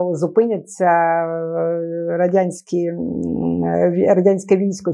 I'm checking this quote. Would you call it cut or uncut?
uncut